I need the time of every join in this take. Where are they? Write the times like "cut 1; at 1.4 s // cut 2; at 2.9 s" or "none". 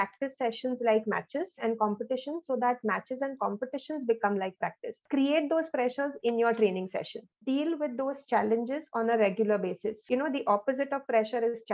cut 1; at 5.0 s // cut 2; at 7.2 s // cut 3; at 10.1 s